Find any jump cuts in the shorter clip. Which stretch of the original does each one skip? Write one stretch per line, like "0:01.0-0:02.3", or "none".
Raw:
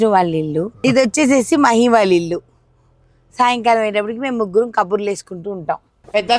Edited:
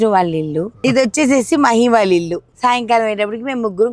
0:02.4-0:03.2